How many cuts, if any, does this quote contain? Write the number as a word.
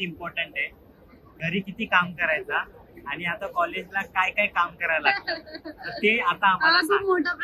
one